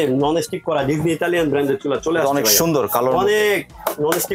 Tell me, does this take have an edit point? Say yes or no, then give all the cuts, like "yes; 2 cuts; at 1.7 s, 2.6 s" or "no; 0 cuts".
no; 0 cuts